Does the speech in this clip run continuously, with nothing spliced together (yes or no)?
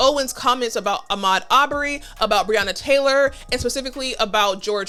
yes